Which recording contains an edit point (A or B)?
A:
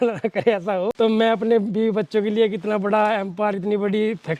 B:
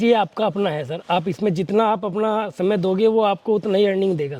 A